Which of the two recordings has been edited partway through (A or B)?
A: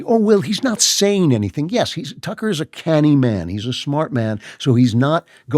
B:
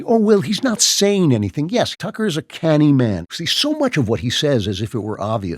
B